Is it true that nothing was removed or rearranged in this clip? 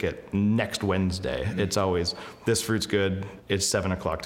no; 1 cut; at 3.3 s

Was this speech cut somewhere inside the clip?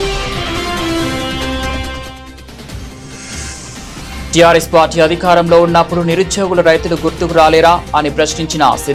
no; 0 cuts

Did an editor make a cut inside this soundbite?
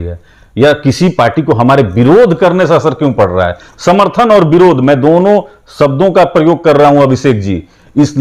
no; 0 cuts

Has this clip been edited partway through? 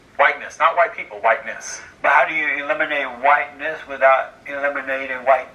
no; 0 cuts

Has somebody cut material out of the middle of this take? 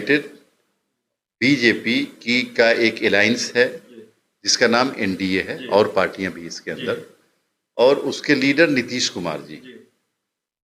no; 0 cuts

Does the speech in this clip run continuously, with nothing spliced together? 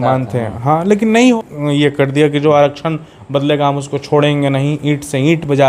no; 1 cut; at 1.4 s

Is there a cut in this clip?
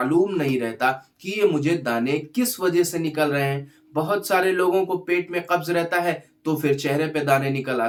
no; 0 cuts

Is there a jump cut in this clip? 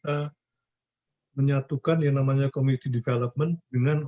no; 0 cuts

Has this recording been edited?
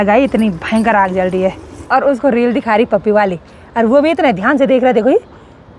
yes; 1 cut; at 1.7 s

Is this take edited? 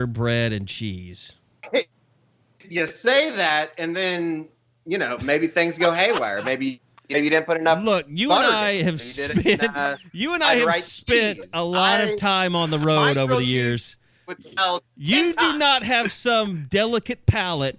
no; 0 cuts

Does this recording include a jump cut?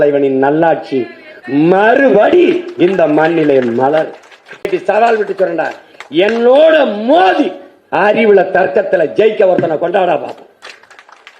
yes; 1 cut; at 4.7 s

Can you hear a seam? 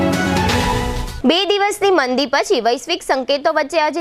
yes; 1 cut; at 1.0 s

